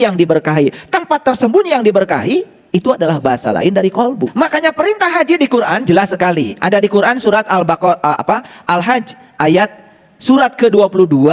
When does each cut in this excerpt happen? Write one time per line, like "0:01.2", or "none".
0:04.3

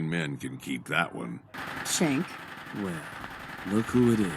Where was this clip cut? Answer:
0:01.6

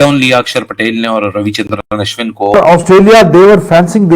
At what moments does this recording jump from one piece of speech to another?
0:02.8

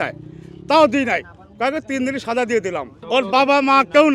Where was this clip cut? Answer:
0:02.9

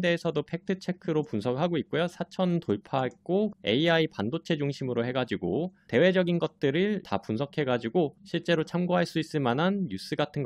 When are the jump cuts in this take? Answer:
0:03.5
0:05.8
0:07.0

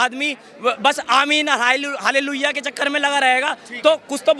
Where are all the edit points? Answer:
none

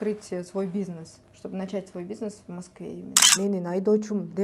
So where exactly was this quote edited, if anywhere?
0:03.2

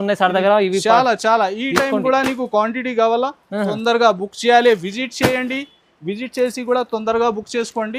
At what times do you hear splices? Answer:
none

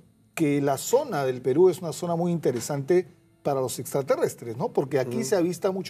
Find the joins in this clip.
0:03.1

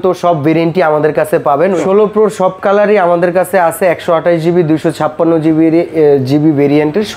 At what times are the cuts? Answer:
0:01.8

